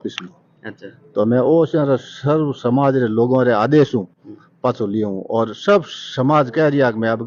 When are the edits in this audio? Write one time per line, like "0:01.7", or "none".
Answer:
none